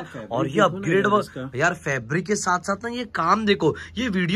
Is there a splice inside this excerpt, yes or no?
no